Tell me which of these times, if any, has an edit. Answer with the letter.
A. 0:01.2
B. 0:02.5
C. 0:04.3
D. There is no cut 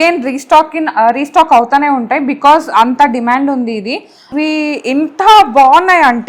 C